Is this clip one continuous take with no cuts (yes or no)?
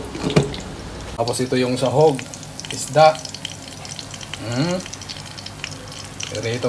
no